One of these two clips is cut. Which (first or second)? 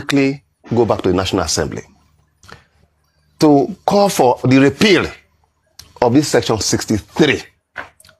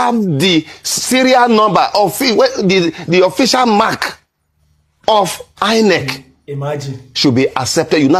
first